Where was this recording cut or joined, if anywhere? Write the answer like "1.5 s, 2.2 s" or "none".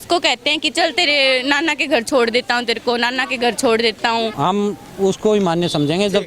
4.3 s